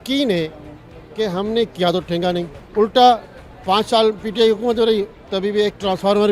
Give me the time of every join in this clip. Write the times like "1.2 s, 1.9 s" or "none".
none